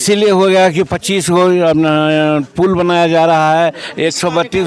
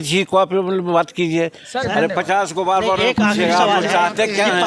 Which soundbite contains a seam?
second; 1 cut; at 1.8 s

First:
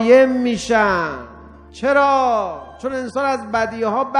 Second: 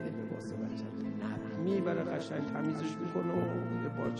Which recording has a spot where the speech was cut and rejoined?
first; 1 cut; at 1.6 s

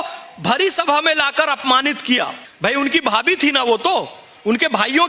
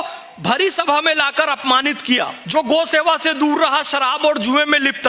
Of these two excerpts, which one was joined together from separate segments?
second; 1 cut; at 2.4 s

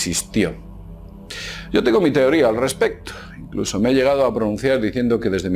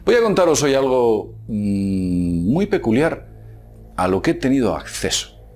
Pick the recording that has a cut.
first; 1 cut; at 1.5 s

